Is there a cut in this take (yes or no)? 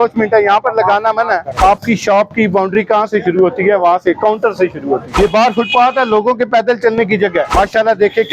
yes